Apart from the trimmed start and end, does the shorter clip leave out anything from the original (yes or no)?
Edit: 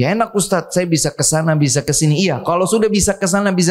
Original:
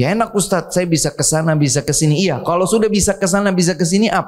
no